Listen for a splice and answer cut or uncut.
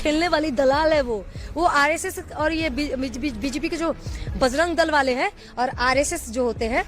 uncut